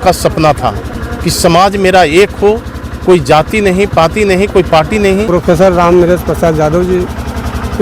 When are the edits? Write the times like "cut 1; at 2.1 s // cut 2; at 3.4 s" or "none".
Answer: cut 1; at 5.3 s